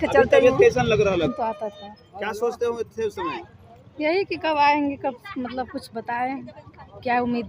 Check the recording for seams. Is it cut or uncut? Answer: cut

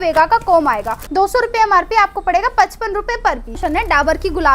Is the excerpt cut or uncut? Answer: cut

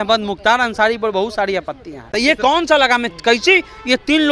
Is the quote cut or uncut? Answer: cut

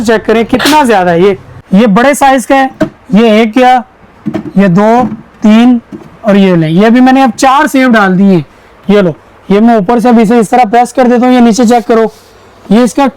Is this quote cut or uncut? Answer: cut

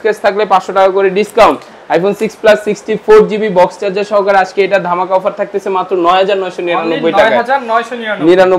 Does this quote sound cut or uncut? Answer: uncut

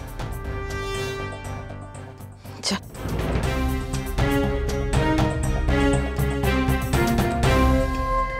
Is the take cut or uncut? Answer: uncut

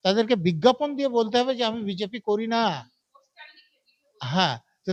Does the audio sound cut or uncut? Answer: uncut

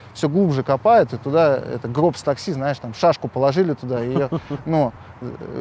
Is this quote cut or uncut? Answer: uncut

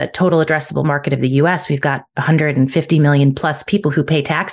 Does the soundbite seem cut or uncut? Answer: uncut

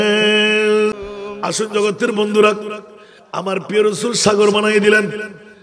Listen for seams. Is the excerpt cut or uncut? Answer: cut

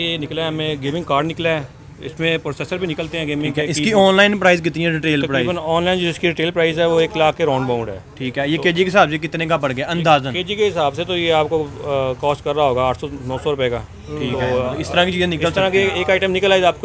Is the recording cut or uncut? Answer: uncut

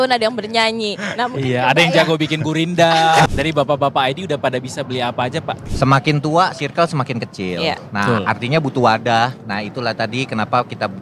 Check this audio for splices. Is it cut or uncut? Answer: cut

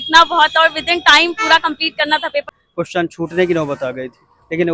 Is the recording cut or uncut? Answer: cut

